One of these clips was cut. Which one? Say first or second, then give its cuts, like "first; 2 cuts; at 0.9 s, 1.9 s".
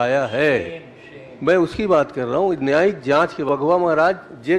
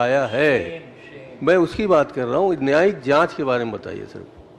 first; 1 cut; at 3.4 s